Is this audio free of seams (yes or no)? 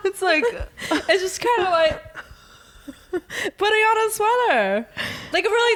yes